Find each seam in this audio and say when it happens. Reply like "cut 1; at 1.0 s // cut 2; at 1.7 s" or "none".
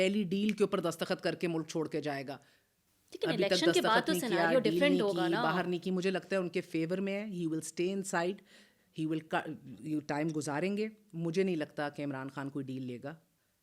none